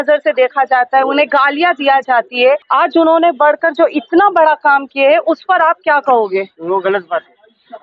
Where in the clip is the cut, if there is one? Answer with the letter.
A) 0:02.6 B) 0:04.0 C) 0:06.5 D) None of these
A